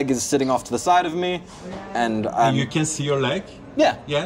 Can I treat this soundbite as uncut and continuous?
yes; 0 cuts

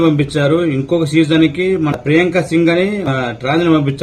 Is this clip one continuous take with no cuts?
no; 2 cuts; at 1.9 s, 3.1 s

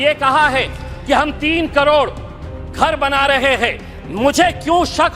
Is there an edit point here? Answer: no; 0 cuts

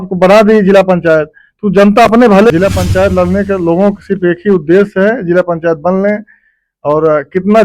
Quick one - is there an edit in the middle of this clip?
yes; 1 cut; at 2.5 s

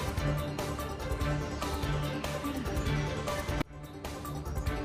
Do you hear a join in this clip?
no; 0 cuts

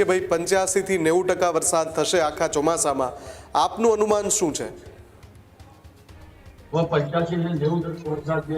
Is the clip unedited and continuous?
yes; 0 cuts

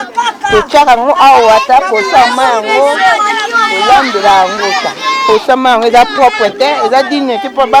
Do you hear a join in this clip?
no; 0 cuts

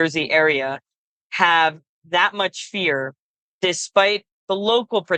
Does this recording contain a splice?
no; 0 cuts

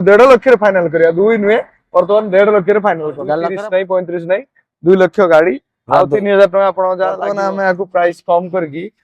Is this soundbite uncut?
no; 2 cuts; at 3.4 s, 7.3 s

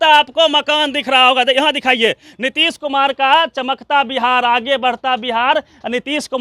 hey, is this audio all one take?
yes; 0 cuts

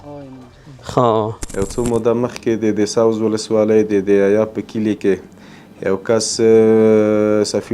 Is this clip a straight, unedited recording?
no; 1 cut; at 1.5 s

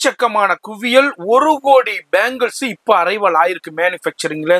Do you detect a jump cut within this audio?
no; 0 cuts

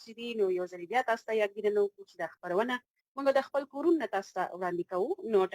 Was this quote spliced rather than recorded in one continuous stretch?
no; 0 cuts

